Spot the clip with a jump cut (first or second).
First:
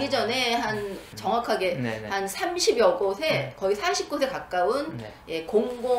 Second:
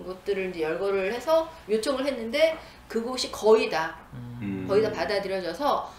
first